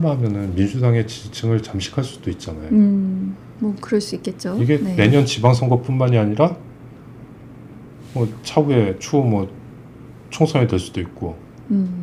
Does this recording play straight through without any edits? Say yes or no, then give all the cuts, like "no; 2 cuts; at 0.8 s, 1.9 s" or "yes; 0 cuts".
yes; 0 cuts